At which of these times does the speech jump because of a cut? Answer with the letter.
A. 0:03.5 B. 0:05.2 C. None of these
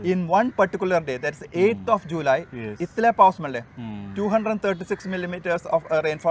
C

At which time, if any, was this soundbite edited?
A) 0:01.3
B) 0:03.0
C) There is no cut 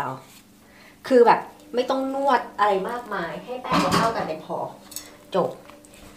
C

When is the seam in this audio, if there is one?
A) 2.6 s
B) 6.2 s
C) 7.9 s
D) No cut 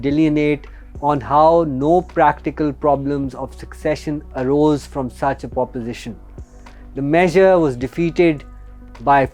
D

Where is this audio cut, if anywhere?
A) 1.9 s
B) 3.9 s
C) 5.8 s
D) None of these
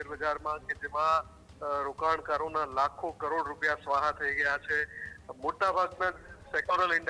D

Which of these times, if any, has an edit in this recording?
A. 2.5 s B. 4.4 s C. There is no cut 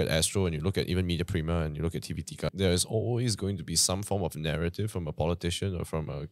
A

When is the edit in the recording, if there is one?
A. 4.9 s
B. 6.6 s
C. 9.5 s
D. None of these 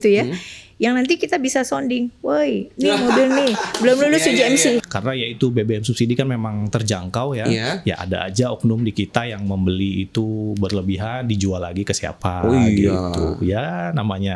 A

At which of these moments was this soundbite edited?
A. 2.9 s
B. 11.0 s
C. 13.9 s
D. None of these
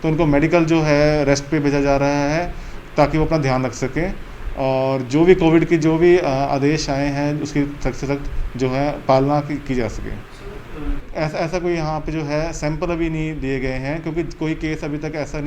D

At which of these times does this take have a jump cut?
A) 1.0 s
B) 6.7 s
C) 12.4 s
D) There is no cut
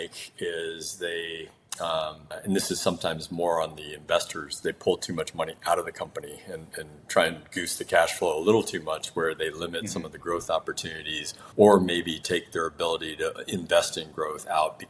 D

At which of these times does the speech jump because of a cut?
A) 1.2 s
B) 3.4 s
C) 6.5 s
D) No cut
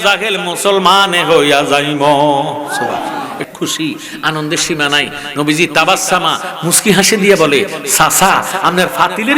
B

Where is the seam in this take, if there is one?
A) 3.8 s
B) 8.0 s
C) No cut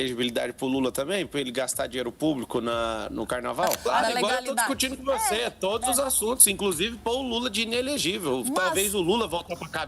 A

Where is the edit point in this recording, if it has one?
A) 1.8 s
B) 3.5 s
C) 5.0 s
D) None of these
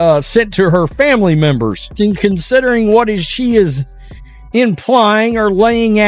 A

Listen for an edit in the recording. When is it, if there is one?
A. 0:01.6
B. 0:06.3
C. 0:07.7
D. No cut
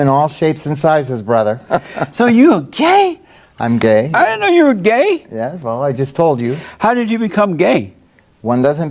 A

